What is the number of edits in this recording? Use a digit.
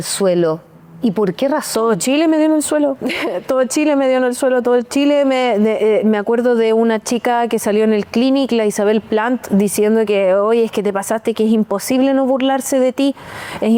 0